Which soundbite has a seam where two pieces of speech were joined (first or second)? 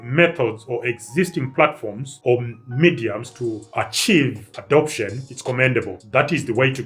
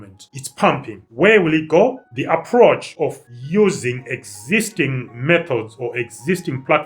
second